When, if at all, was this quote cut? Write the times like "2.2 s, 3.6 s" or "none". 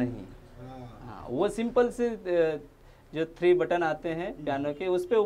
none

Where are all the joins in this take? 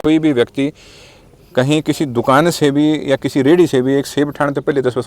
none

